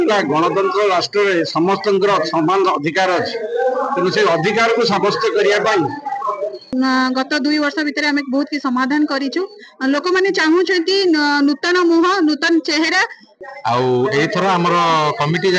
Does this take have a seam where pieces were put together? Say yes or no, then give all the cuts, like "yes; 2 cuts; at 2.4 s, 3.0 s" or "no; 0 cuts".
yes; 2 cuts; at 6.7 s, 13.3 s